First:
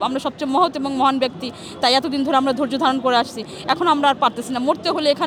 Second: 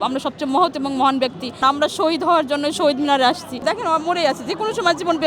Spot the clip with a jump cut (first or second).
second